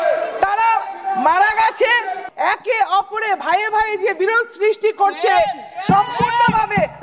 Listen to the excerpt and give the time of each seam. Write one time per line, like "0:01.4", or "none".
0:02.2